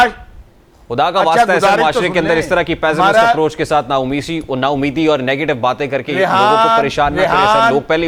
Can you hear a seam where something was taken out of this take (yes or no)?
no